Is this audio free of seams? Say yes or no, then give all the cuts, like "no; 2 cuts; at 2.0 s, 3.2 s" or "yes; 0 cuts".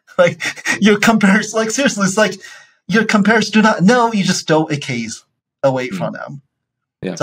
yes; 0 cuts